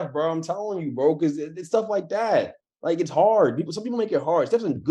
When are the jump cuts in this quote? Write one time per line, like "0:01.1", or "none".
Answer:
none